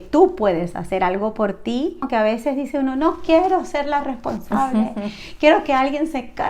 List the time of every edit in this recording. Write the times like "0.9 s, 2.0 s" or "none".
2.1 s